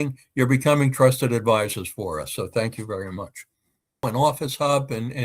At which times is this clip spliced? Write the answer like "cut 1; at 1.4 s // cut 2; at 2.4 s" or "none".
cut 1; at 4.0 s